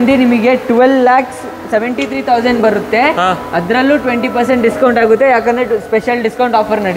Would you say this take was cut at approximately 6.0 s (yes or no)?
no